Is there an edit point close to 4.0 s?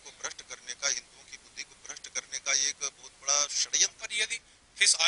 yes; 1 cut; at 4.0 s

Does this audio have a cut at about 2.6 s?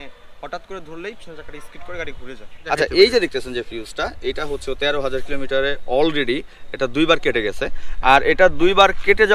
yes; 1 cut; at 2.6 s

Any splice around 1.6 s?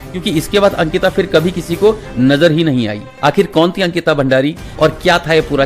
no; 2 cuts; at 3.0 s, 4.6 s

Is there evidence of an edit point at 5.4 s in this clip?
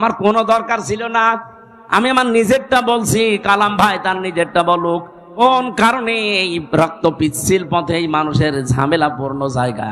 yes; 1 cut; at 5.4 s

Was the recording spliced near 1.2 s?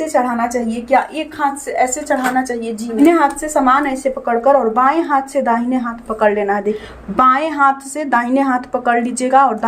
no; 2 cuts; at 3.0 s, 6.8 s

